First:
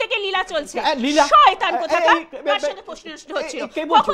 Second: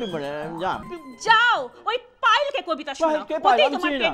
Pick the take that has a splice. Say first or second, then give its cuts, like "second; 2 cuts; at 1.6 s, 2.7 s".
second; 1 cut; at 0.9 s